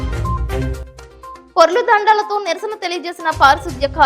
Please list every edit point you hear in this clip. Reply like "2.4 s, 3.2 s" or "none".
1.3 s